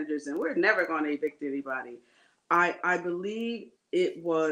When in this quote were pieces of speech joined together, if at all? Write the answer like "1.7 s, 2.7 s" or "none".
none